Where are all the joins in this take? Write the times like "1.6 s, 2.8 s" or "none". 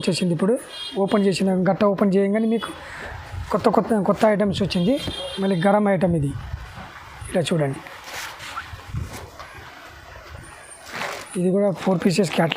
10.8 s

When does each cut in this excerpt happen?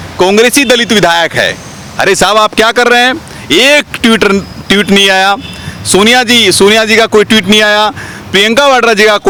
none

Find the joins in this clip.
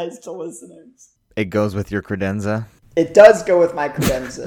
0.8 s, 2.8 s

